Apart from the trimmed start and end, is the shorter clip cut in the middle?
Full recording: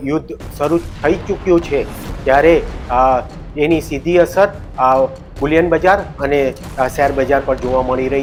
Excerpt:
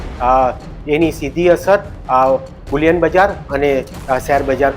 no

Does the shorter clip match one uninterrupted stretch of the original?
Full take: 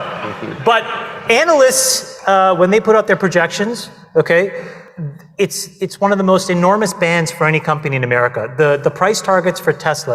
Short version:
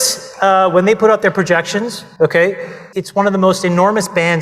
no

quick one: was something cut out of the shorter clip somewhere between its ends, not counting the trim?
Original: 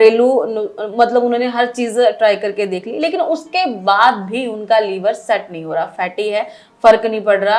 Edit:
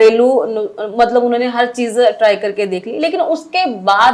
no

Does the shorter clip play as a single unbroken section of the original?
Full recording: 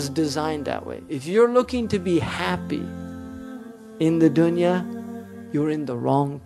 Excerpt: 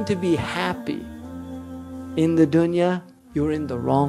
no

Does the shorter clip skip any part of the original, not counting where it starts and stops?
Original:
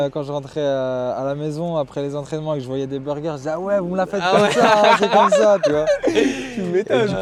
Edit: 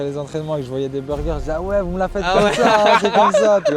no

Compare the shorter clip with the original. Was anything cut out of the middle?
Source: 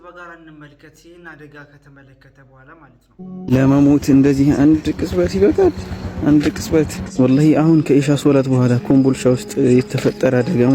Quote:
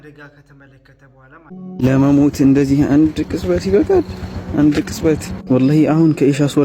yes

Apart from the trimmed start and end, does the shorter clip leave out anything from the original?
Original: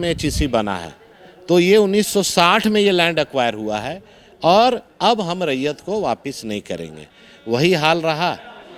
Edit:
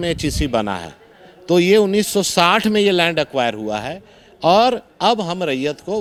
no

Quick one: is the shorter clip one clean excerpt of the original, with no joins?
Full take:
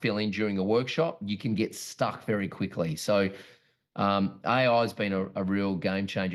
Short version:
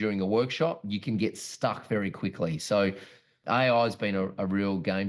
no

